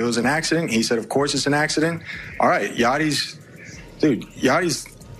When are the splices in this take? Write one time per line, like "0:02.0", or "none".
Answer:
none